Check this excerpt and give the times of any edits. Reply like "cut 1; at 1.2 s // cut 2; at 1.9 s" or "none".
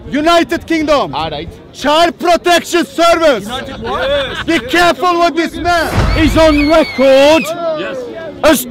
cut 1; at 6.0 s